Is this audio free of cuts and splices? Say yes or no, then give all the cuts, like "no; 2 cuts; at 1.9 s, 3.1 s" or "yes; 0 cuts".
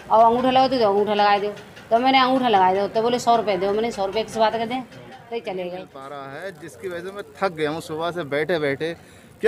no; 1 cut; at 6.0 s